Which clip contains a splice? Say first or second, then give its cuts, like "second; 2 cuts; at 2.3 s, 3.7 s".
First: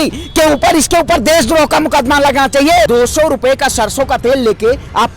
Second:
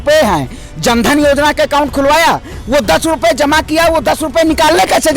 first; 1 cut; at 2.9 s